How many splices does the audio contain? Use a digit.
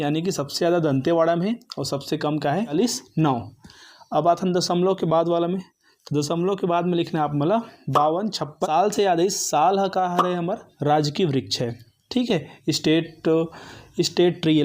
2